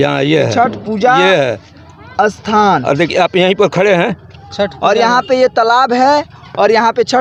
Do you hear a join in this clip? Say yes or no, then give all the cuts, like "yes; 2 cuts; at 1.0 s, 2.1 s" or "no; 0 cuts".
no; 0 cuts